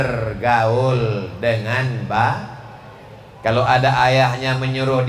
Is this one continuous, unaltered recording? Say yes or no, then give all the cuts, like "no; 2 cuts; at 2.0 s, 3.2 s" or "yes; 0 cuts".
yes; 0 cuts